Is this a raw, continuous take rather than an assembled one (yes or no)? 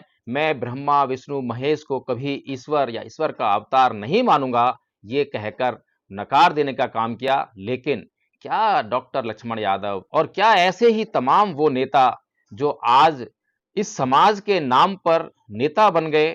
yes